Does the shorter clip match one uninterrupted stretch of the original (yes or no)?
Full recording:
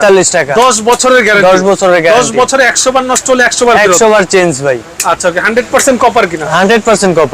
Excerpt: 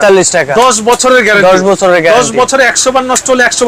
yes